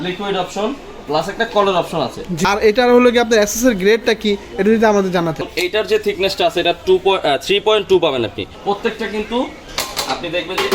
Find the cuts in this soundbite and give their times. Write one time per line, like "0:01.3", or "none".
0:02.3
0:05.5
0:08.5

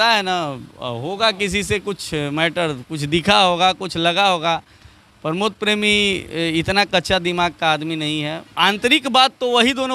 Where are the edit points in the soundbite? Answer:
0:08.4

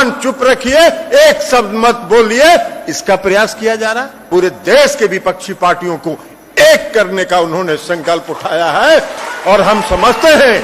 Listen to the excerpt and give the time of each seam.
0:04.3

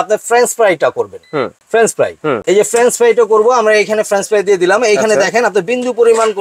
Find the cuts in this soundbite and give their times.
0:01.6
0:02.4

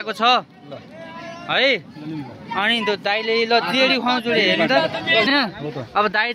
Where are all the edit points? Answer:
0:05.3

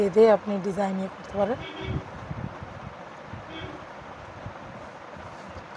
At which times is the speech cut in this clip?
none

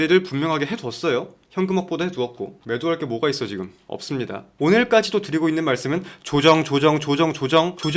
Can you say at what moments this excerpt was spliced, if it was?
0:04.5

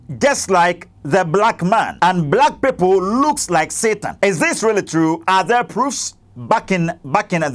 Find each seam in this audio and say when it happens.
0:01.9
0:04.1

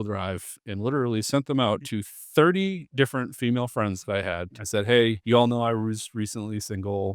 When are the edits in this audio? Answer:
0:04.4
0:05.2

